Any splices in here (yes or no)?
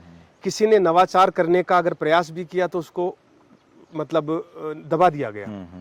no